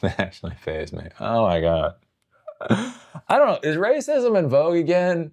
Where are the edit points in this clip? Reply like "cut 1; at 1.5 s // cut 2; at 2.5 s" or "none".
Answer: none